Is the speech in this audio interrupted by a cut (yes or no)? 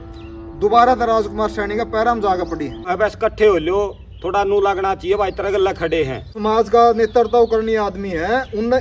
yes